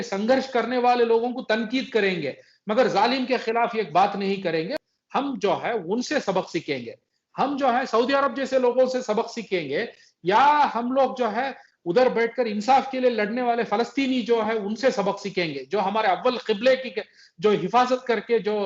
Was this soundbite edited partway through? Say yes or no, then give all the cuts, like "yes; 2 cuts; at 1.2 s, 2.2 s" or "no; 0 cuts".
yes; 1 cut; at 4.8 s